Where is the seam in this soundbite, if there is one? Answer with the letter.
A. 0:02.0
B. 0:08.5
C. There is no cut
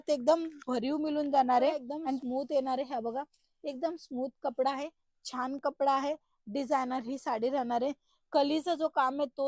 A